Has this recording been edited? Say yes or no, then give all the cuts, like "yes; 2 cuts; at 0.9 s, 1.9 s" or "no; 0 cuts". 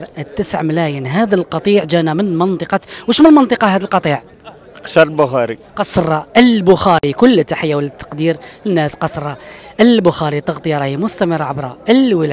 no; 0 cuts